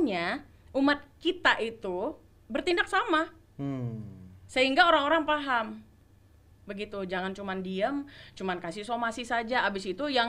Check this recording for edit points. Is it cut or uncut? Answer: uncut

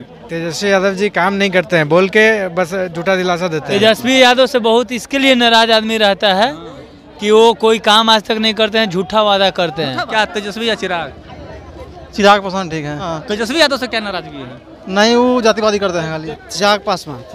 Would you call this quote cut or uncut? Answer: cut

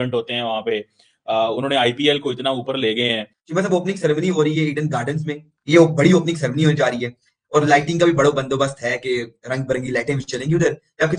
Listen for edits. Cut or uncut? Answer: cut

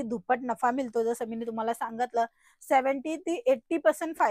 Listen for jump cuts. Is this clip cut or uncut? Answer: uncut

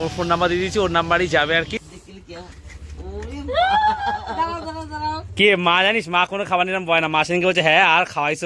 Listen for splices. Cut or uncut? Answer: cut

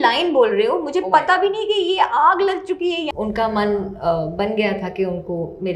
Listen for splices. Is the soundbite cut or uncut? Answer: cut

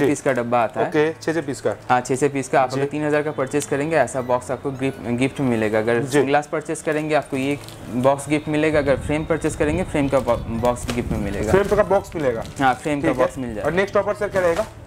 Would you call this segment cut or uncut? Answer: uncut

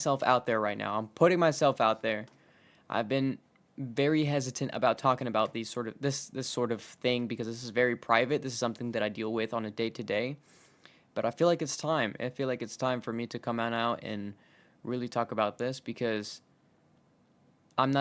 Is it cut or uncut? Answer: uncut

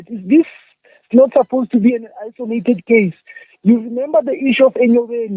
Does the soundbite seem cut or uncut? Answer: uncut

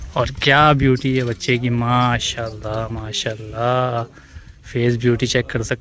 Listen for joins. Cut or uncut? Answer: uncut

